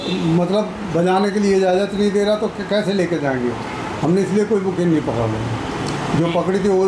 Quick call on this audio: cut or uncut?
uncut